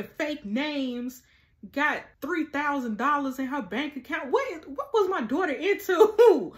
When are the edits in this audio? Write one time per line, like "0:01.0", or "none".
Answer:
0:02.1